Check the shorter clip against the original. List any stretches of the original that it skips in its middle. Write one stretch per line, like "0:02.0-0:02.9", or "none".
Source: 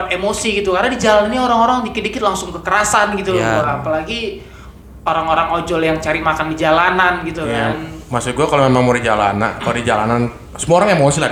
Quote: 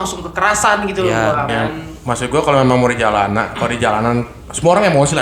0:03.8-0:07.5